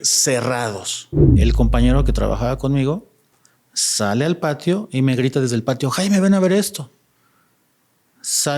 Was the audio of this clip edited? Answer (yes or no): yes